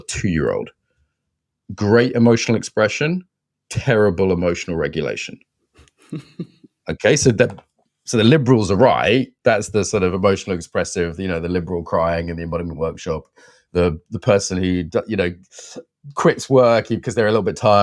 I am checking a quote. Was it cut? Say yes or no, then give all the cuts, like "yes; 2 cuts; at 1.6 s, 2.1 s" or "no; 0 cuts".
no; 0 cuts